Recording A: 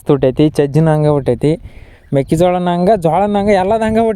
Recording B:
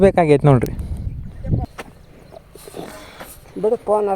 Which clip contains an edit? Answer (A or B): B